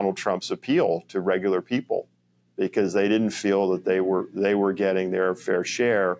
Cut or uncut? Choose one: uncut